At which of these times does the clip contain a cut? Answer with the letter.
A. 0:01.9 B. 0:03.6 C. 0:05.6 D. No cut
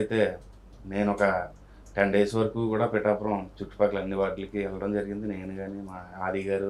D